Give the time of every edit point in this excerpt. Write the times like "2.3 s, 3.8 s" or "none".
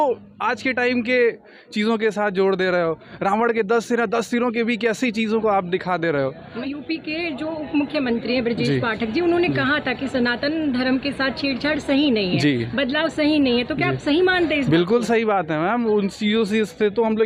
none